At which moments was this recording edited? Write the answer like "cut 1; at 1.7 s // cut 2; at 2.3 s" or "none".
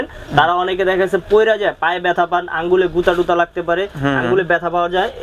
none